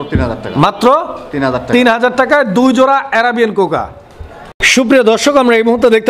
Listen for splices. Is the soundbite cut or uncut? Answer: uncut